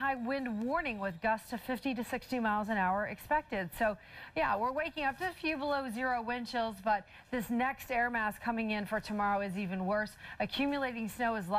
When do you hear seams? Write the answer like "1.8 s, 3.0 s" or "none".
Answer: none